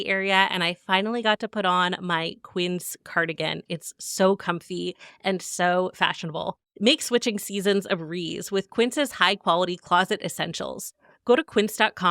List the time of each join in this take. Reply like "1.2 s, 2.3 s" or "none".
3.6 s, 6.6 s

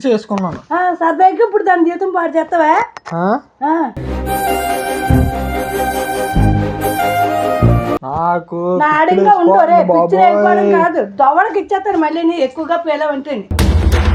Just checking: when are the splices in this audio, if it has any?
none

